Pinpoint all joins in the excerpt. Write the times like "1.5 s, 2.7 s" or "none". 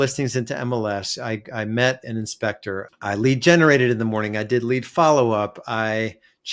2.9 s